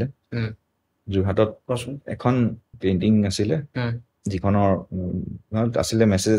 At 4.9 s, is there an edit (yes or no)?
no